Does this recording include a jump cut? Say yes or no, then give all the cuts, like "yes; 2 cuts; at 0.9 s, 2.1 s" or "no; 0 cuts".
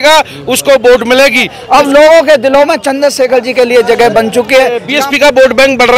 yes; 2 cuts; at 1.6 s, 4.9 s